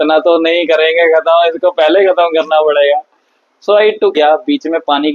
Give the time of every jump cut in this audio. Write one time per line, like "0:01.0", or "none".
0:04.2